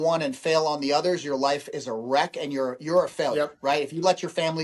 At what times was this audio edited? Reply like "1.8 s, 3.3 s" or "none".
none